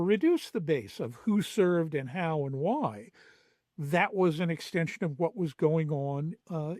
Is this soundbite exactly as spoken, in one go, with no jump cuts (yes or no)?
yes